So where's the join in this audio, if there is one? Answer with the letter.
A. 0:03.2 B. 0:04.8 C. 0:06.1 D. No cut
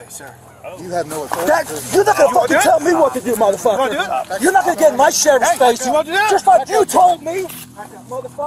D